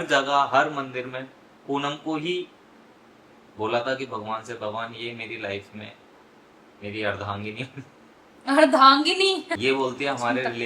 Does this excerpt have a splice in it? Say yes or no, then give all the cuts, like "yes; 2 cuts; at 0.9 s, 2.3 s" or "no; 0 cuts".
yes; 1 cut; at 9.6 s